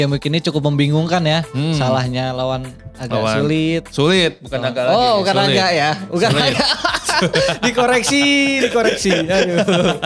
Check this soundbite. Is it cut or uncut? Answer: uncut